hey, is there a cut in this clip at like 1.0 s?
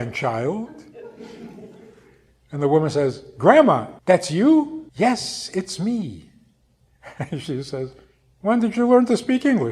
no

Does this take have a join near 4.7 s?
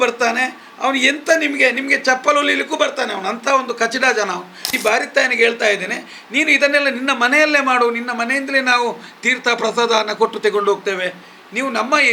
yes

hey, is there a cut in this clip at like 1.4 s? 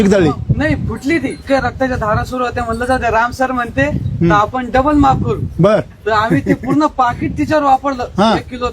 yes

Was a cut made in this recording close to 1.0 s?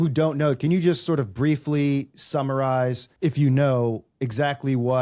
no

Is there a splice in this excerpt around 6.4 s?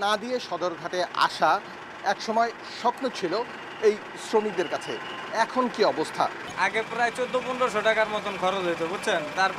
yes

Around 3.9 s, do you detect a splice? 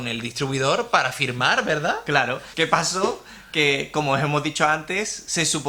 no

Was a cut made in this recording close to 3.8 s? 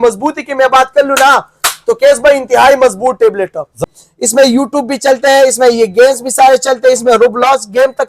yes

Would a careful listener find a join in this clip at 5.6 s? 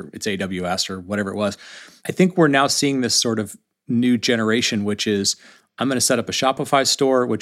yes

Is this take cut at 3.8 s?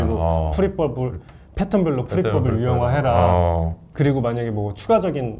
yes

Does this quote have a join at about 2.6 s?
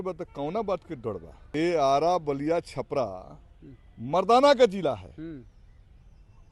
no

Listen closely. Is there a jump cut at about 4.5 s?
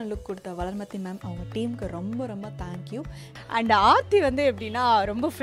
no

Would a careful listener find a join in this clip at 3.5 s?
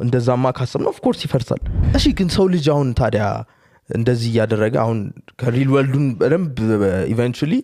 no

